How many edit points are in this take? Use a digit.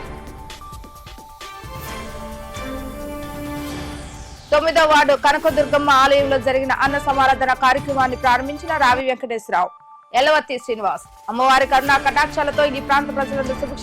1